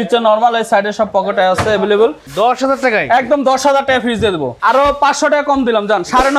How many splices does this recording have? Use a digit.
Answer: 2